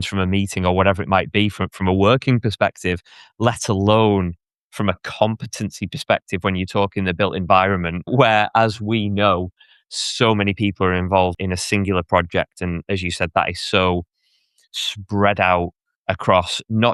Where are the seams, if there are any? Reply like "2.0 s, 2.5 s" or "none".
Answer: 8.1 s, 11.4 s